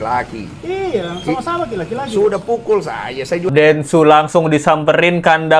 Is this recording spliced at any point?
yes; 1 cut; at 3.5 s

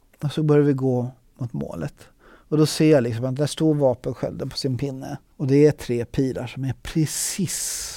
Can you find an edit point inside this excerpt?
no; 0 cuts

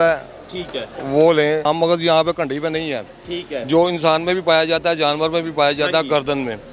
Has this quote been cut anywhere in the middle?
yes; 1 cut; at 1.7 s

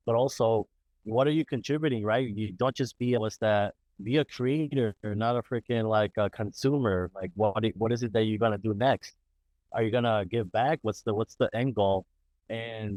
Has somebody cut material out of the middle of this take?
no; 0 cuts

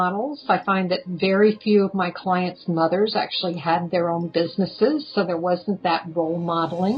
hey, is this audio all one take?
yes; 0 cuts

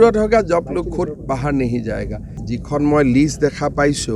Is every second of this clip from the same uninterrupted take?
no; 1 cut; at 2.3 s

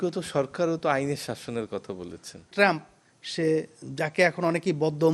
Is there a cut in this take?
yes; 1 cut; at 2.5 s

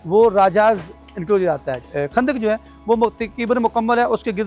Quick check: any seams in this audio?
yes; 1 cut; at 1.8 s

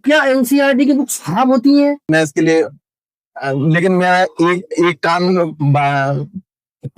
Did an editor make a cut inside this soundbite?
yes; 1 cut; at 2.0 s

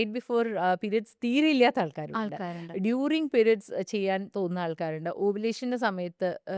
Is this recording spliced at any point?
no; 0 cuts

